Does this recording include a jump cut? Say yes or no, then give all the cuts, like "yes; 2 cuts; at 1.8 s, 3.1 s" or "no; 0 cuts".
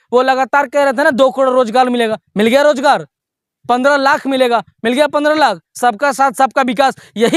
no; 0 cuts